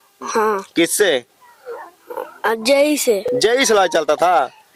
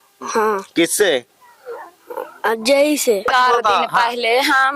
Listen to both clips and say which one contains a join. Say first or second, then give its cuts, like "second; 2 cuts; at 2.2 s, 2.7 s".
second; 1 cut; at 3.3 s